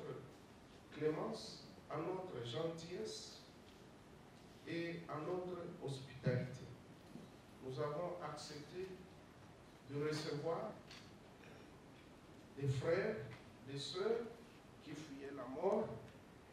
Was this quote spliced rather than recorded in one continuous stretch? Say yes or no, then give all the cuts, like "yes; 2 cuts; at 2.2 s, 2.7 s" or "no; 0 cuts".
no; 0 cuts